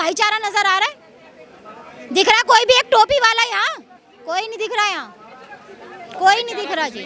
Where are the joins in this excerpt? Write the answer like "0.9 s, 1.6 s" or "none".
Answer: none